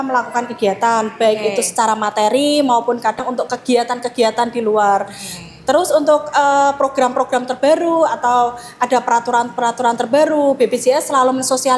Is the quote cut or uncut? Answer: uncut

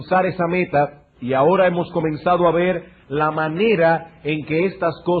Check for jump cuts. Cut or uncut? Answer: uncut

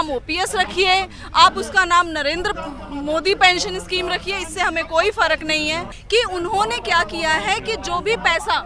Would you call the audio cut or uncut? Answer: cut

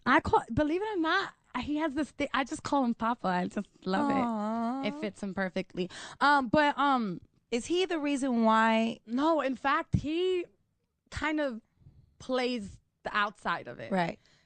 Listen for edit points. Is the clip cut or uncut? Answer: cut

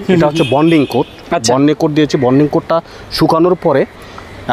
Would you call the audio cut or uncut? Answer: uncut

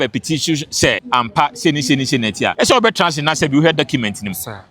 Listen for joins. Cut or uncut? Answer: cut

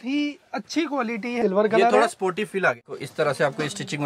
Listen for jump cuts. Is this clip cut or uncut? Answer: cut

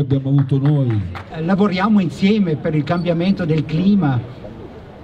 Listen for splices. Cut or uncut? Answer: cut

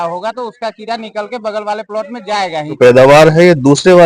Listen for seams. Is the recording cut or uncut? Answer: cut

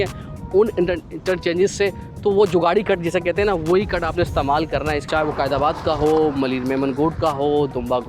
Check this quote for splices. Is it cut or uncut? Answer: cut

